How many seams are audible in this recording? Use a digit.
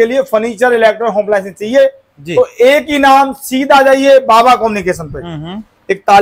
0